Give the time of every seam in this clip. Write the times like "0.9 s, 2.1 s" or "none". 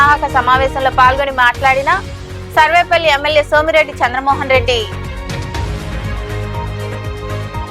4.9 s, 6.8 s